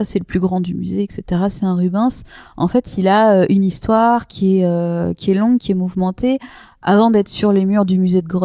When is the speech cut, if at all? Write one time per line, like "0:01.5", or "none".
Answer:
none